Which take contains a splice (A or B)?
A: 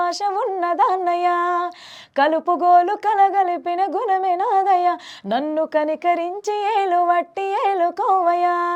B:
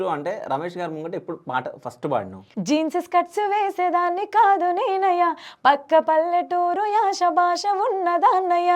B